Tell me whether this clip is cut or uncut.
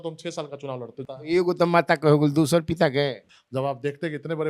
cut